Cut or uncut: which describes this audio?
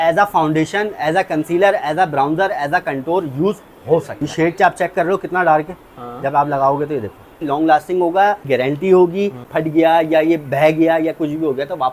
cut